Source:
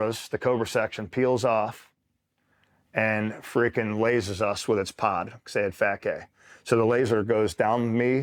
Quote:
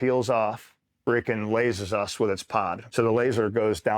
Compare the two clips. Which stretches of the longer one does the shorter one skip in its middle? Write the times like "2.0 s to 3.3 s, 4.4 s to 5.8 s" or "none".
2.1 s to 3.4 s, 5.3 s to 6.5 s